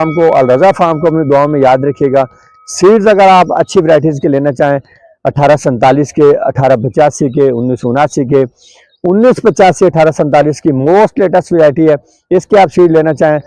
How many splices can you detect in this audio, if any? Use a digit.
0